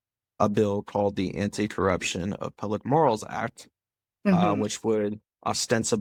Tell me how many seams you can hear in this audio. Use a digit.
0